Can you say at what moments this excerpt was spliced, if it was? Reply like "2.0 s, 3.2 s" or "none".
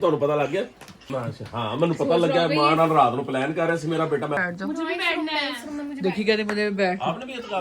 0.9 s, 4.4 s